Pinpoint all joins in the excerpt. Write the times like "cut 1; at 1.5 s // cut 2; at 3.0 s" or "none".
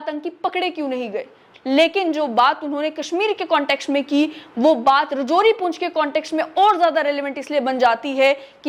cut 1; at 1.4 s